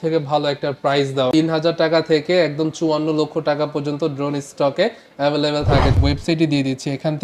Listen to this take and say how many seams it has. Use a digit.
2